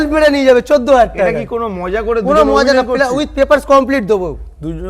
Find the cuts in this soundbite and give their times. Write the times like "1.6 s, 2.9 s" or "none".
none